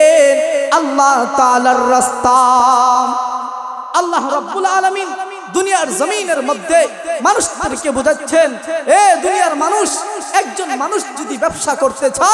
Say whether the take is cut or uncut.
uncut